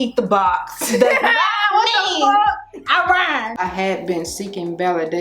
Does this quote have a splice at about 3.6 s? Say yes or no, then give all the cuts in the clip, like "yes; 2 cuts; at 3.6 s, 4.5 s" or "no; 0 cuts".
yes; 1 cut; at 3.6 s